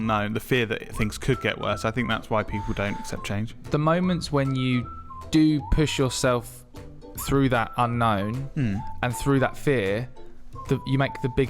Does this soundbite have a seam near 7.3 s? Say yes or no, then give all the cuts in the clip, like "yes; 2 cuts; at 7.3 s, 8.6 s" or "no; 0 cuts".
no; 1 cut; at 3.5 s